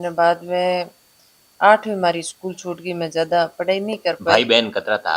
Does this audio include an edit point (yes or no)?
no